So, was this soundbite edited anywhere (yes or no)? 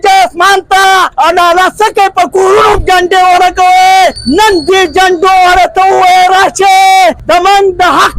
yes